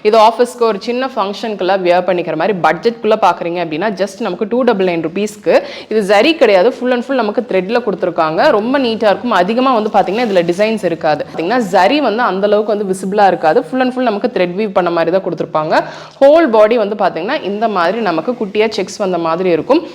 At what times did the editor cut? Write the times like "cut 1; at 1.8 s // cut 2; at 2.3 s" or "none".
cut 1; at 11.4 s